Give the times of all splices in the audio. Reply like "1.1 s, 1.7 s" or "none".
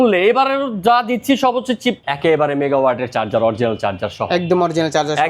2.0 s